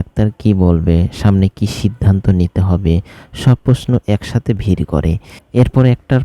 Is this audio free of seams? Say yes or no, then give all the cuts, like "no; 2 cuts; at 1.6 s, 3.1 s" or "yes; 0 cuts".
no; 1 cut; at 5.3 s